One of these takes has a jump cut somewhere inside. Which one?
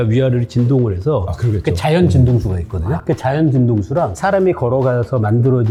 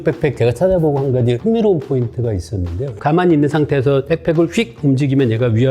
second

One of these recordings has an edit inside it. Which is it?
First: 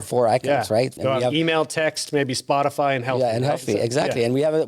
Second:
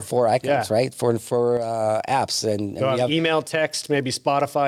first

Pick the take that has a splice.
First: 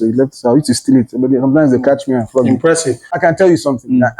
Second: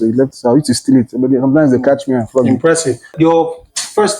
first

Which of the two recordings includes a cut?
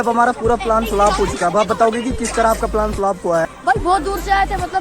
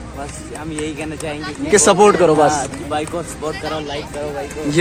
first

